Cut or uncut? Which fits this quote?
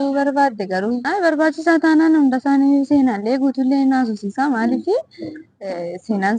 cut